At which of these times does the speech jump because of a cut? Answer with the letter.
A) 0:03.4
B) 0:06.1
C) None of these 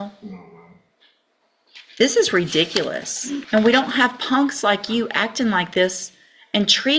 A